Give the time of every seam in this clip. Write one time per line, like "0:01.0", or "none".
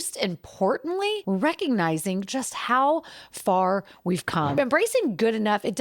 0:01.2
0:04.6